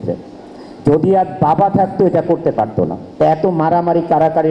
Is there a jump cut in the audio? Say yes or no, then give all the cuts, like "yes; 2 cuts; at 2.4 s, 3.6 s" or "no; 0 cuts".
yes; 1 cut; at 3.0 s